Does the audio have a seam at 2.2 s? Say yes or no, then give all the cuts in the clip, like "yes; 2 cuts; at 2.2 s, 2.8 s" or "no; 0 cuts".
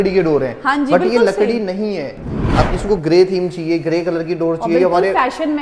yes; 1 cut; at 2.2 s